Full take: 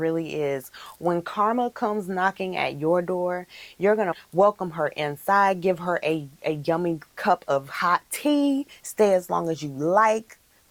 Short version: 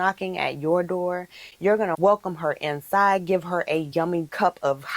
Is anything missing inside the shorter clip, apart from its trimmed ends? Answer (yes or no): yes